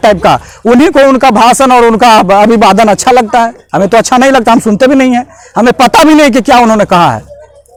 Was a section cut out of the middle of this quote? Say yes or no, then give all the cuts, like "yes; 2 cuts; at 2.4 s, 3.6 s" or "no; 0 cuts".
no; 0 cuts